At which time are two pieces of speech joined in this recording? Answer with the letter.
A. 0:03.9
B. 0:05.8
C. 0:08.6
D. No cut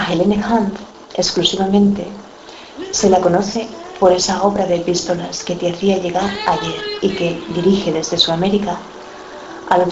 B